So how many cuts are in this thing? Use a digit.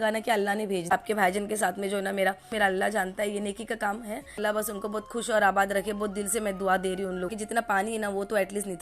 4